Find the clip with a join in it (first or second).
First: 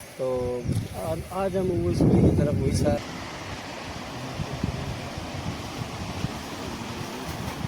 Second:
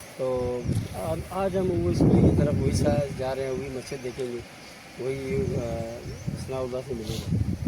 first